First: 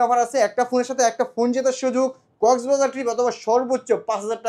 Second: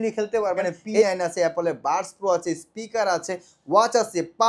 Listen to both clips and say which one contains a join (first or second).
second